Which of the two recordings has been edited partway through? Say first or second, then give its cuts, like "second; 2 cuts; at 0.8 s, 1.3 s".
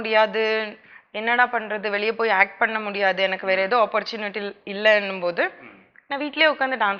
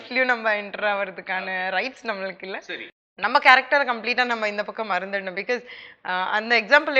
second; 1 cut; at 2.6 s